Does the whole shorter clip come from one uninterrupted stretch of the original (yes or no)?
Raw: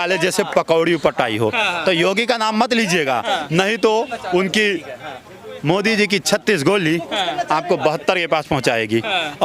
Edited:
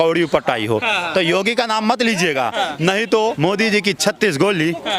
no